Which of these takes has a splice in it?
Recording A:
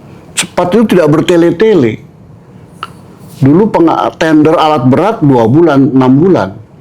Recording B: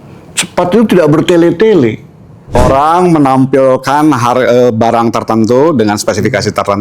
B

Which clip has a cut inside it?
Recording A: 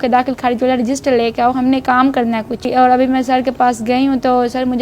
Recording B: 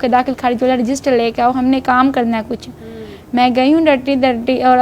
A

